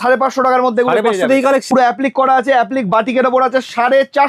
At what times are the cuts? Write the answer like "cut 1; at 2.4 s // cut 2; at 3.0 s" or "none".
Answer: cut 1; at 1.7 s